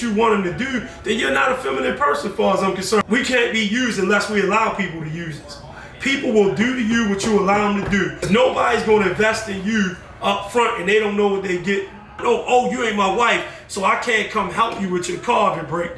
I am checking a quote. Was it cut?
yes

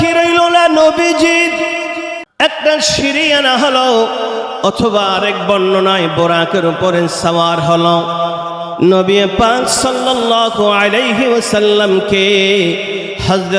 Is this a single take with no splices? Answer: no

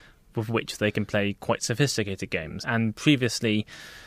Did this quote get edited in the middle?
yes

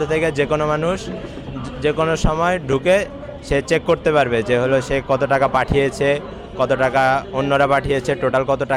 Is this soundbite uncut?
yes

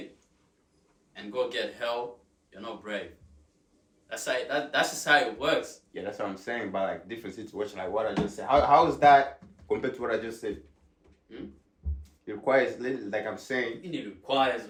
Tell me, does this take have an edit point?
no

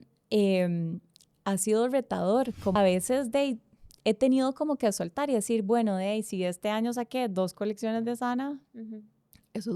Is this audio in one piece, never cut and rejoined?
no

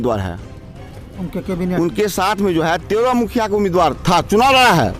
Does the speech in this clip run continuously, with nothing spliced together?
yes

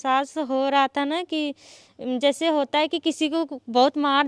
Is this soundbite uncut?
yes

